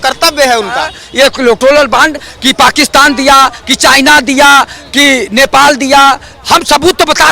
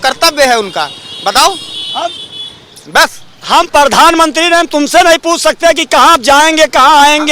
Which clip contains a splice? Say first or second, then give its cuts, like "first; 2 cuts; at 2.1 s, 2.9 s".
first; 2 cuts; at 1.0 s, 6.3 s